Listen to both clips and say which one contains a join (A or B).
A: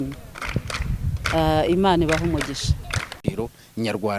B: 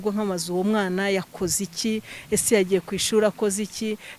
A